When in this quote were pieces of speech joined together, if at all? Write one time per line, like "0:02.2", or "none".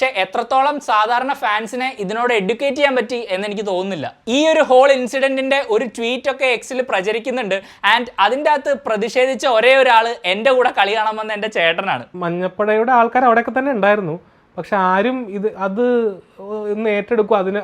0:04.2
0:12.1